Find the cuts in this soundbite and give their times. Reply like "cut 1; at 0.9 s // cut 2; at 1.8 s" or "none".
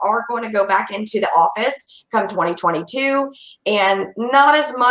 none